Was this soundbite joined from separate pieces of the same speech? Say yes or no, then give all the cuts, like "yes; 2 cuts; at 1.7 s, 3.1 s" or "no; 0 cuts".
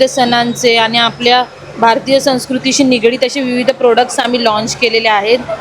no; 0 cuts